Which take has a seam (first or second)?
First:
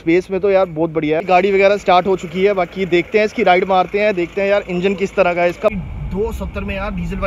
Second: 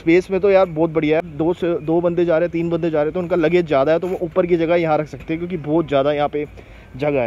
first